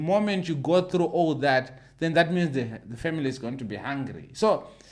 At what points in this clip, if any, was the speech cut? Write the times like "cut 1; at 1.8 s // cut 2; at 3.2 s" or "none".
none